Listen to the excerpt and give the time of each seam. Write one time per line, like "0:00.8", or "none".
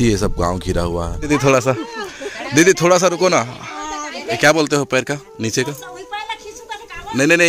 0:01.3
0:04.3